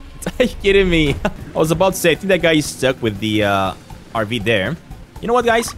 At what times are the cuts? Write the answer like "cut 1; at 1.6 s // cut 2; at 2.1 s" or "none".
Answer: cut 1; at 1.4 s // cut 2; at 3.9 s